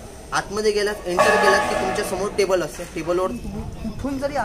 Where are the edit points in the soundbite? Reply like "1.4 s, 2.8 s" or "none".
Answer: 3.3 s